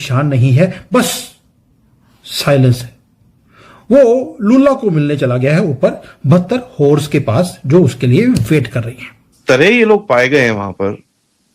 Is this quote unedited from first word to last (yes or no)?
no